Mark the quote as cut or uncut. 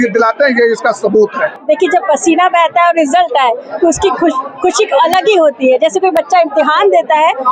cut